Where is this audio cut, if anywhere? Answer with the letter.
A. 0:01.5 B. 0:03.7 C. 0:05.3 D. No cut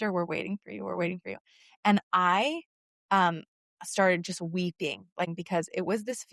C